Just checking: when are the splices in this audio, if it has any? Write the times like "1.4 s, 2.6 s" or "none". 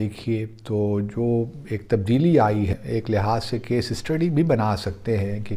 2.8 s